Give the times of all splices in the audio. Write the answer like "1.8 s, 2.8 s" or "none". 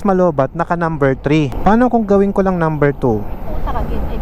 none